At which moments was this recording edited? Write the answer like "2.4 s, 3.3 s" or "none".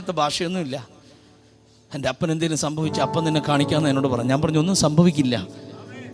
none